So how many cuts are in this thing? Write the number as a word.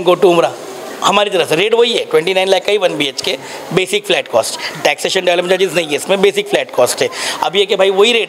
zero